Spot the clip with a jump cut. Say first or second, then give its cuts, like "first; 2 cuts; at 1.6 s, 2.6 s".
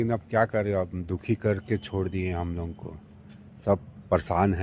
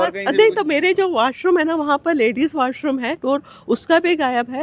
second; 1 cut; at 3.2 s